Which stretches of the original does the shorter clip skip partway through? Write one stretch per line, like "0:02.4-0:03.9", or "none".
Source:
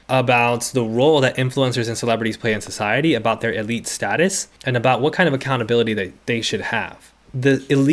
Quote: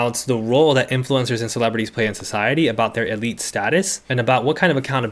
0:04.5-0:04.6